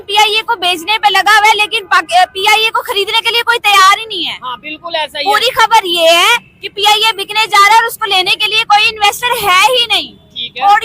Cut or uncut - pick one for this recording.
uncut